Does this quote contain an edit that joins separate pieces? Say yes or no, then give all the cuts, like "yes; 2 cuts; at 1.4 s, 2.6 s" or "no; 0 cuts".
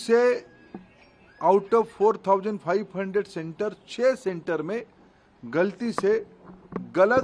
no; 0 cuts